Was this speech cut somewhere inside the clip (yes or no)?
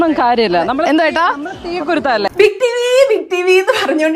yes